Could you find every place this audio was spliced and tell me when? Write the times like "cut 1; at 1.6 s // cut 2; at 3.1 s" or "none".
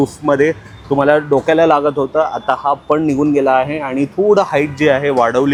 none